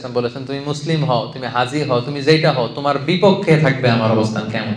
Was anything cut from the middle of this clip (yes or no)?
no